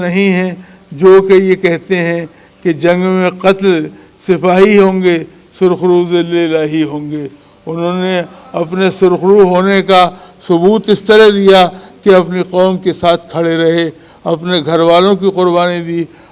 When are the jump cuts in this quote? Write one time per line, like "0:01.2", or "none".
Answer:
none